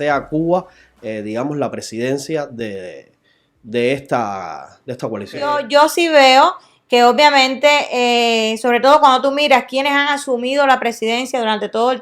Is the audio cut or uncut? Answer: cut